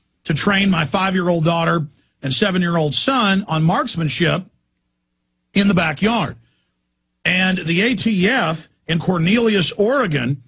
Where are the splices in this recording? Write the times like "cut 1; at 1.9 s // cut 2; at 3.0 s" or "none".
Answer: cut 1; at 9.4 s